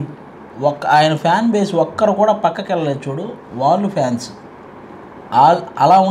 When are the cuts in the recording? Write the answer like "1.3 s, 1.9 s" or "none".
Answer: none

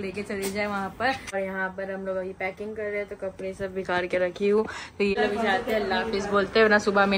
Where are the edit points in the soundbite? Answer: 1.3 s, 5.2 s

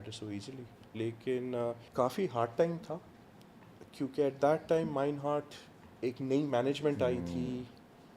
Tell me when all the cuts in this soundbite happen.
1.8 s

